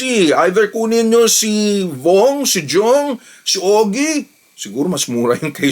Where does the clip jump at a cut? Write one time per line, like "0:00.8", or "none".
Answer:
0:04.3